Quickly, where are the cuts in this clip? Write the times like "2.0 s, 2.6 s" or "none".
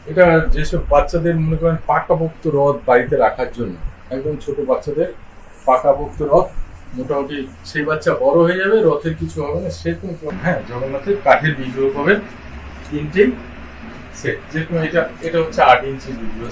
10.3 s